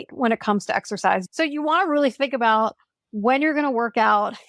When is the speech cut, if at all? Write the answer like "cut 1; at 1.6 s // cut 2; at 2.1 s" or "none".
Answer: cut 1; at 1.2 s